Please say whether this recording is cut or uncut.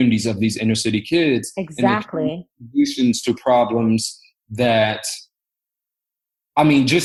uncut